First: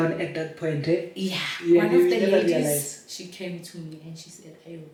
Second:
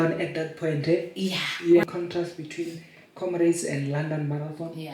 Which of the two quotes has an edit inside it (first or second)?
second